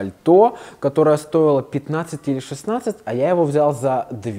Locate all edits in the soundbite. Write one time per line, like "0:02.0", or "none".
none